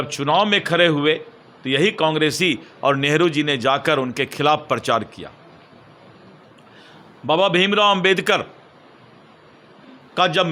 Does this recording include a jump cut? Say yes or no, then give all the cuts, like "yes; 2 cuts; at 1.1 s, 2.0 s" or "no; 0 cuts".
no; 0 cuts